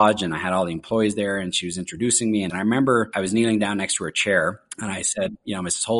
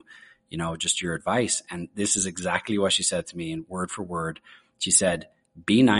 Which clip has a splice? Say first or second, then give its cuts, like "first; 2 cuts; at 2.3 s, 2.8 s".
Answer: first; 3 cuts; at 2.5 s, 3.1 s, 4.7 s